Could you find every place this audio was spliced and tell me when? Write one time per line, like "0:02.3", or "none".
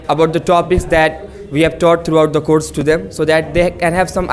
none